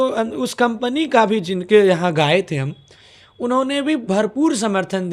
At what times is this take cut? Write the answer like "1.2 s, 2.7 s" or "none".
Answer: none